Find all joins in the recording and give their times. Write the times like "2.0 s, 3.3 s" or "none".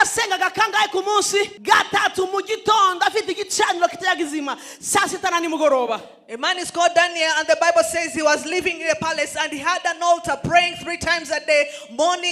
1.6 s